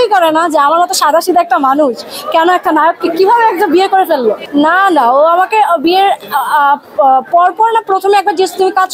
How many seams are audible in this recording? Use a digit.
1